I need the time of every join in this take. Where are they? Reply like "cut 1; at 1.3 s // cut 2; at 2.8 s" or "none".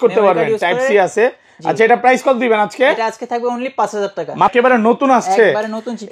cut 1; at 4.5 s